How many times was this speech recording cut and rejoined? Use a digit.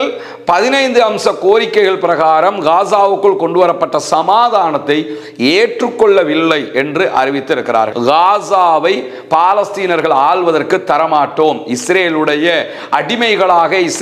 1